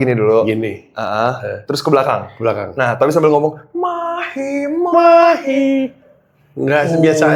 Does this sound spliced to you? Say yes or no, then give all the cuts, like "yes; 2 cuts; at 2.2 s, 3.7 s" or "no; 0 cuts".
no; 0 cuts